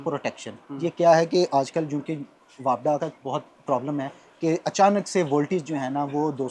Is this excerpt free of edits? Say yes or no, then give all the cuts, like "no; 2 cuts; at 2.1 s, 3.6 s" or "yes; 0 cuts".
yes; 0 cuts